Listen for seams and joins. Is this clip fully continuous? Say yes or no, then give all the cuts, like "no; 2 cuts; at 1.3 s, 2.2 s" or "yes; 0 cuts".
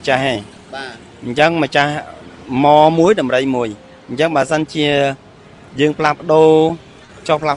yes; 0 cuts